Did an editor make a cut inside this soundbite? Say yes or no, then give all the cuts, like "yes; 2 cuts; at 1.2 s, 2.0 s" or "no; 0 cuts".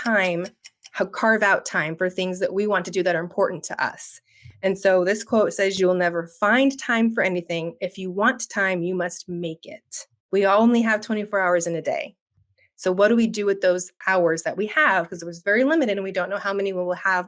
yes; 2 cuts; at 10.2 s, 13.9 s